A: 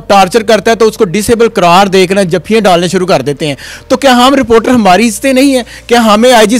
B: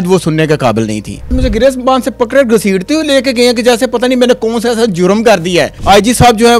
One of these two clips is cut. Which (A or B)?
B